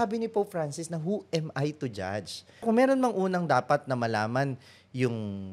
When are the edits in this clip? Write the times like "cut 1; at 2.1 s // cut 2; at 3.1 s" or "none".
cut 1; at 2.6 s

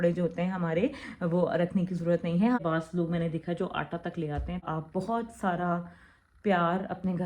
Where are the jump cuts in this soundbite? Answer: cut 1; at 2.6 s // cut 2; at 4.6 s

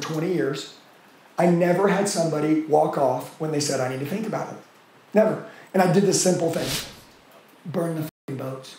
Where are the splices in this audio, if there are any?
cut 1; at 6.7 s

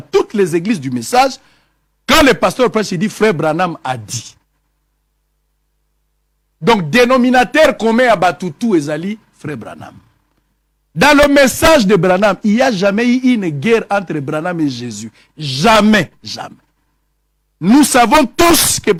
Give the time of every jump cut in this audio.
none

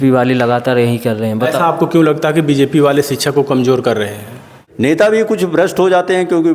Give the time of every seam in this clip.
cut 1; at 4.5 s

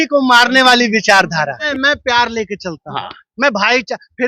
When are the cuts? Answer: cut 1; at 1.6 s

